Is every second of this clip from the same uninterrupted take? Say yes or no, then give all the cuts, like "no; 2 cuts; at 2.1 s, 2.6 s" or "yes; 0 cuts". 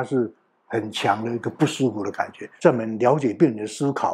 no; 1 cut; at 2.5 s